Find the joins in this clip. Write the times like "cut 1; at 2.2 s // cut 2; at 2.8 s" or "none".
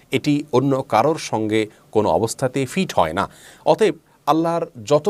none